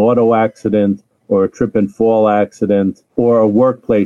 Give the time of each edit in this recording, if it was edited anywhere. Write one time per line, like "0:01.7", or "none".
0:03.0